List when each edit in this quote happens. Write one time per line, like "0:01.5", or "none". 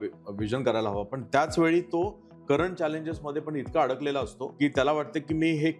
0:04.4